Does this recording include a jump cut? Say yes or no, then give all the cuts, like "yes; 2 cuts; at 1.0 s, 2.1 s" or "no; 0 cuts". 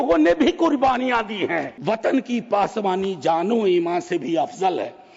yes; 1 cut; at 1.7 s